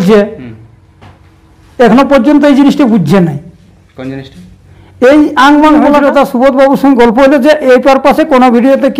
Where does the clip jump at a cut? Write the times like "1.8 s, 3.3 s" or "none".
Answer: 6.0 s